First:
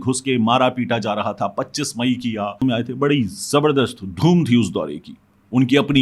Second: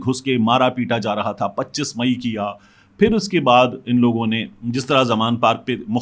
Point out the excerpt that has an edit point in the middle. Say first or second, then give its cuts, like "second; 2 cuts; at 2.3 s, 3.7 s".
first; 1 cut; at 2.6 s